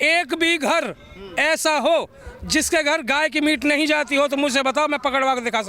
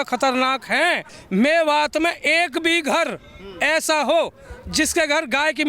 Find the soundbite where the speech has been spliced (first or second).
second